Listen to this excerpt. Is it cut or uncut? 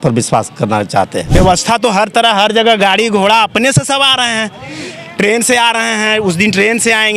cut